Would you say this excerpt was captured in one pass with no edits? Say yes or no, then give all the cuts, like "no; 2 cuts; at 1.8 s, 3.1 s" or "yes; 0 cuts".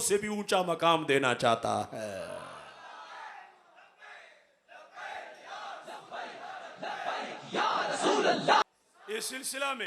yes; 0 cuts